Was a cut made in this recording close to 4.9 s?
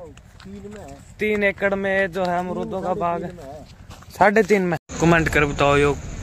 yes; 1 cut; at 4.9 s

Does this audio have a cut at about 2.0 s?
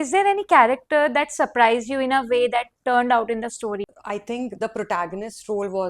no; 1 cut; at 3.9 s

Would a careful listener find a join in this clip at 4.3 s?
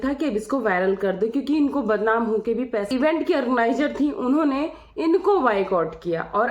no; 1 cut; at 2.9 s

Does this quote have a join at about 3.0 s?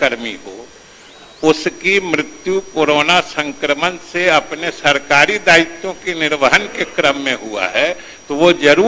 no; 0 cuts

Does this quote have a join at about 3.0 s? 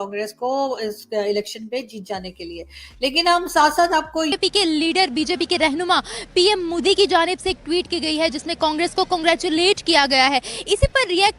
no; 1 cut; at 4.4 s

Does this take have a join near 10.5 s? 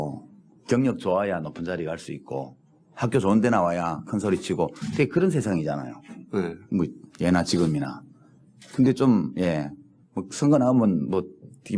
no; 1 cut; at 5.1 s

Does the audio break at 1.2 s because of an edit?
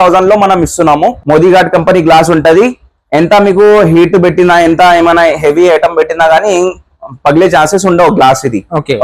yes; 1 cut; at 1.2 s

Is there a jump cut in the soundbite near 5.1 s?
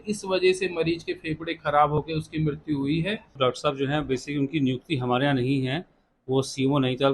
no; 1 cut; at 3.4 s

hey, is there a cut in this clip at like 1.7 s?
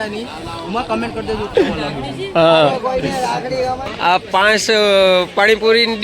no; 1 cut; at 3.9 s

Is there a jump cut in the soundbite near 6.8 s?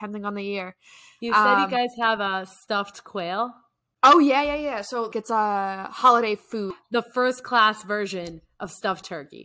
yes; 2 cuts; at 5.2 s, 6.8 s

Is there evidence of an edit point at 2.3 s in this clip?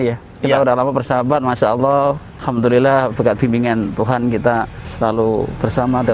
yes; 2 cuts; at 2.3 s, 4.8 s

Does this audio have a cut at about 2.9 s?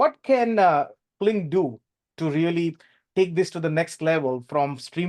no; 1 cut; at 1.0 s

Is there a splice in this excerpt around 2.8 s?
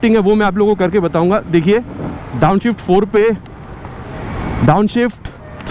no; 0 cuts

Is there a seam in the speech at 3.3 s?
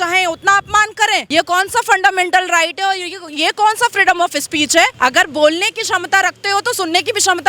no; 2 cuts; at 1.3 s, 4.9 s

